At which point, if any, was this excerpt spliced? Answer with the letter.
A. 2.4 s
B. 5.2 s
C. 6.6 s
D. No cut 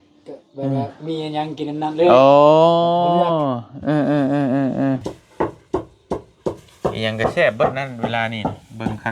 B